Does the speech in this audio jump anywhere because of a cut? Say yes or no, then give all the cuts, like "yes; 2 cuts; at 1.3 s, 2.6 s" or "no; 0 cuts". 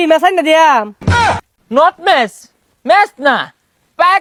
no; 0 cuts